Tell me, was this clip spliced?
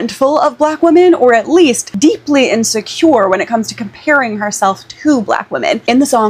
no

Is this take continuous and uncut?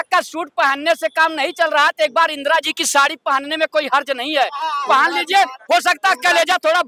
yes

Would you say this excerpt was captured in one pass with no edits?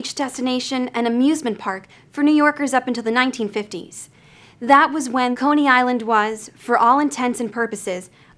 no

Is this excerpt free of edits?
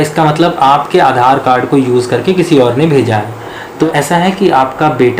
no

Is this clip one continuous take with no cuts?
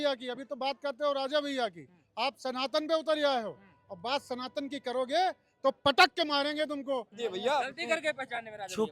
no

